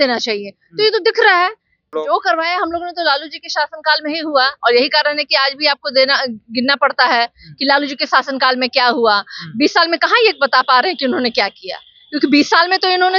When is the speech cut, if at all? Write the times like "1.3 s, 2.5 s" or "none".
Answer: 1.9 s